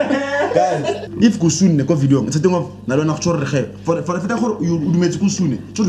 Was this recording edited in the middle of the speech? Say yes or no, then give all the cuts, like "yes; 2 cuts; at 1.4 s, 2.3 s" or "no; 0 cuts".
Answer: yes; 1 cut; at 1.1 s